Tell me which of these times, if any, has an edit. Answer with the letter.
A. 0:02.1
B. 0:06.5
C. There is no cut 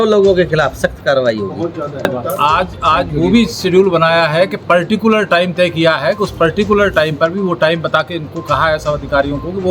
A